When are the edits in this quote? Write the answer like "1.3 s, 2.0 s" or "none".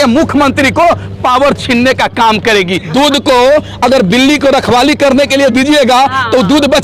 2.9 s